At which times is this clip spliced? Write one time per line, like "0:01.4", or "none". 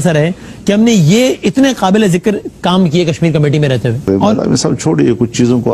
none